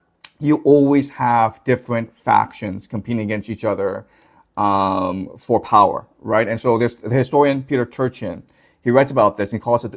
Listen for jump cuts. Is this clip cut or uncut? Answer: uncut